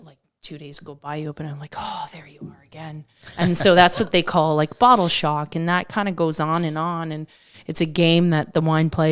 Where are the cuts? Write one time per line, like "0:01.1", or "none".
none